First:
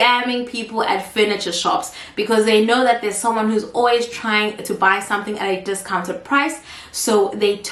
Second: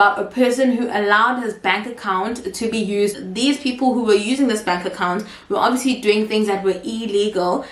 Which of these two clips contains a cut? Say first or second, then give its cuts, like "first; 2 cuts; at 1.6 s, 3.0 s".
second; 1 cut; at 3.2 s